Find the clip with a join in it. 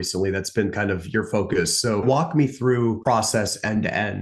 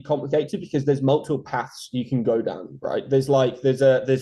first; 2 cuts; at 2.0 s, 3.0 s

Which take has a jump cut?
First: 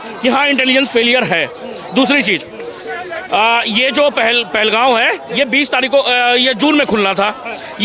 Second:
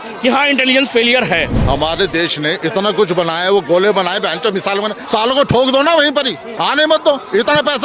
second; 3 cuts; at 1.5 s, 5.0 s, 6.4 s

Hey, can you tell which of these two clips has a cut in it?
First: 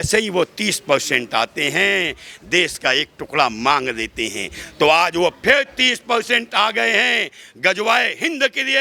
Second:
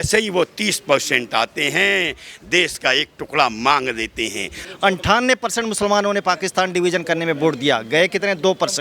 second; 1 cut; at 4.6 s

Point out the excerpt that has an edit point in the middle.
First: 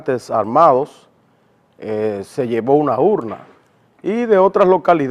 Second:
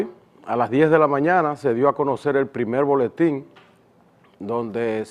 first; 1 cut; at 2.3 s

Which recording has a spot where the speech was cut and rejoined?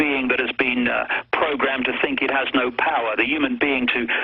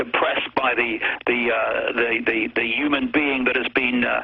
first; 1 cut; at 2.4 s

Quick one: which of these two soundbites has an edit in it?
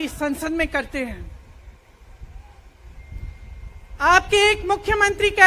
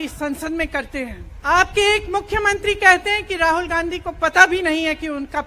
second; 1 cut; at 1.3 s

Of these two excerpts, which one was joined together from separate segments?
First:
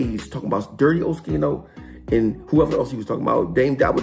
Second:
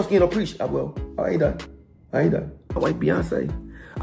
second; 1 cut; at 2.8 s

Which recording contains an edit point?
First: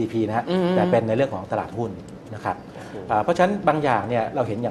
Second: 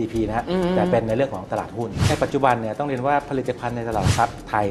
second; 1 cut; at 2.1 s

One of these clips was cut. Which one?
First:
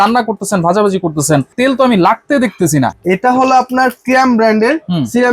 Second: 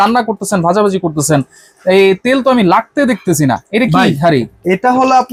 first; 2 cuts; at 1.5 s, 3.0 s

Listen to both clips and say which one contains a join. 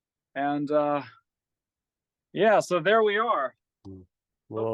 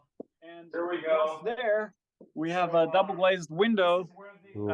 second; 1 cut; at 1.4 s

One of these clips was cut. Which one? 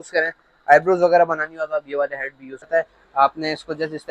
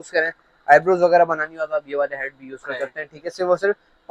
first; 1 cut; at 2.7 s

